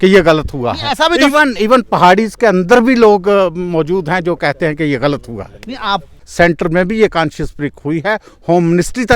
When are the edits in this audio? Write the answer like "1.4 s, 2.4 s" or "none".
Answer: 6.1 s